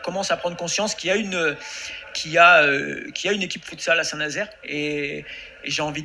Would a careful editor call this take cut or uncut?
uncut